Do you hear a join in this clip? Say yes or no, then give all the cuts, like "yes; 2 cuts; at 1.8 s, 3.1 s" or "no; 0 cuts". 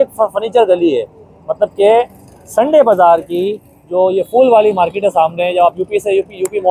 no; 0 cuts